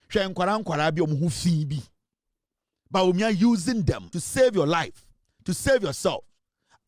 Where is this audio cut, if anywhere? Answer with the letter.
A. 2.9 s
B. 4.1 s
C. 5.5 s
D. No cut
B